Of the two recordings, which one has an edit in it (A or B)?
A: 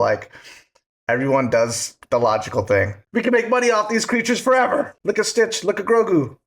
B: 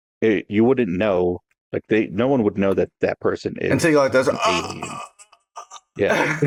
A